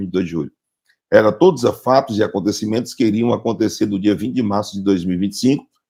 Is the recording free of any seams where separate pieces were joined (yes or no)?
yes